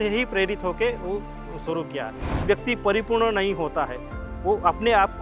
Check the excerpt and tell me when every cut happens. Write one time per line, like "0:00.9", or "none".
0:02.3